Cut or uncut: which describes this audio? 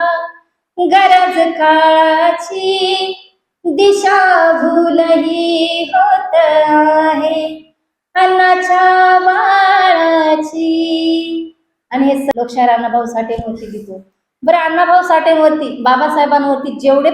cut